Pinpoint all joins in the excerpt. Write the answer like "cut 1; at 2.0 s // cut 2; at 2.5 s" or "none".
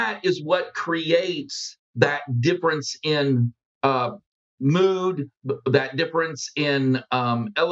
none